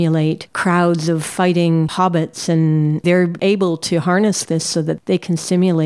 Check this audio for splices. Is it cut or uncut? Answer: uncut